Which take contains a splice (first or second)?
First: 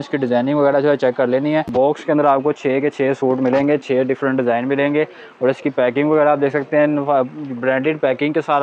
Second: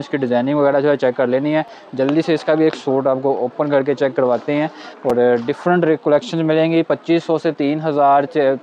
first